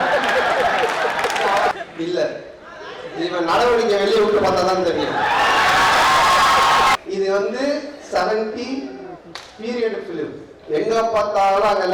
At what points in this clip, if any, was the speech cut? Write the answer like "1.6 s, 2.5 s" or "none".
1.7 s, 6.9 s